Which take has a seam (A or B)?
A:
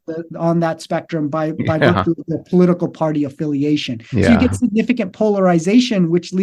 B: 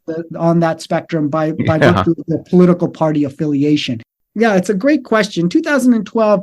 B